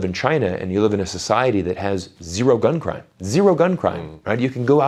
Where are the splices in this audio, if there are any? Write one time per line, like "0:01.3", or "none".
none